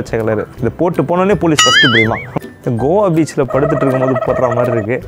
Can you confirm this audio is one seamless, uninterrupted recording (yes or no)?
no